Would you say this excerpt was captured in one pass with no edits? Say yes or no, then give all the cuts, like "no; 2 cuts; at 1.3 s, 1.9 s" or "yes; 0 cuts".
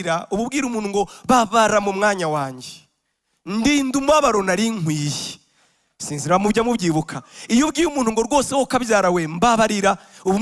yes; 0 cuts